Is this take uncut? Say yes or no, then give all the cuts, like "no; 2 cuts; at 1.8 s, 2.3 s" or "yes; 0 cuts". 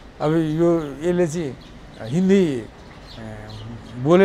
yes; 0 cuts